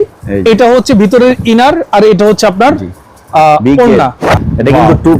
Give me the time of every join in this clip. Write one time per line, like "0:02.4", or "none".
0:04.2